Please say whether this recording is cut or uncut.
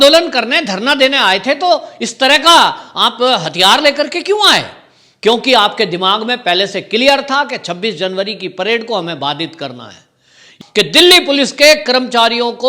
cut